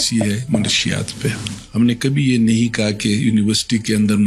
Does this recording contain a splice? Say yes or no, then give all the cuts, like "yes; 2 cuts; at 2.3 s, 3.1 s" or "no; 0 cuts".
no; 0 cuts